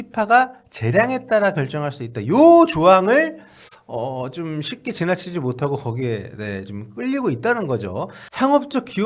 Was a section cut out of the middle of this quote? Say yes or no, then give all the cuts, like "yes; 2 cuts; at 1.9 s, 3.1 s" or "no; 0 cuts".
no; 0 cuts